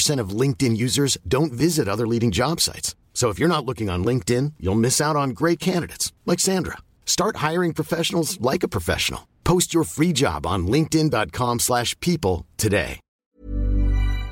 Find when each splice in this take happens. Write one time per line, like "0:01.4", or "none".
0:13.1